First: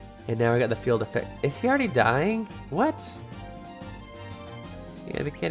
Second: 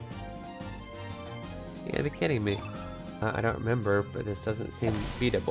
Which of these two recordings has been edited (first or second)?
second